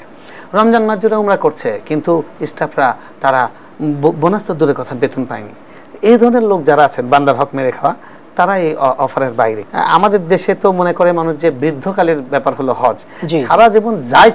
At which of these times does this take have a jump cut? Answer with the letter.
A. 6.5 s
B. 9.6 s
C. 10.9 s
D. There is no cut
B